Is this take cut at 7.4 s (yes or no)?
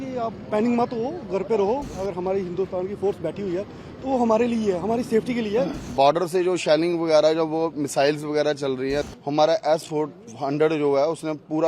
no